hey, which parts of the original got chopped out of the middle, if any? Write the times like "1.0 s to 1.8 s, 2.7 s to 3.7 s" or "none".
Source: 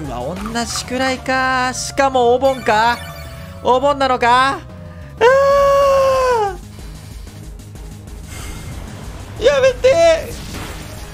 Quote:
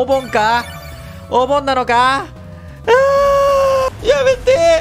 6.2 s to 9.2 s